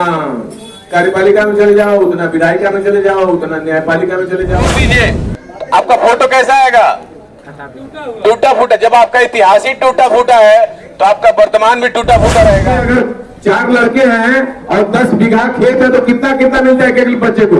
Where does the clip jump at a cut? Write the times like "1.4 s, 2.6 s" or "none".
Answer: 4.7 s, 12.8 s